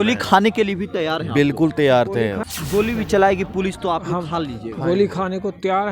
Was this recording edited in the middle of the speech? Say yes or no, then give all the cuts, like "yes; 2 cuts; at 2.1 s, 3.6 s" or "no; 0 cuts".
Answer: yes; 1 cut; at 2.4 s